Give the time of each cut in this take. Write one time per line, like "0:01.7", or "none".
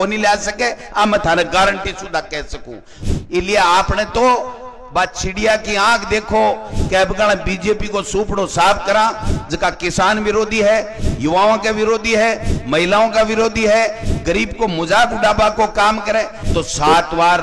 0:02.9
0:16.4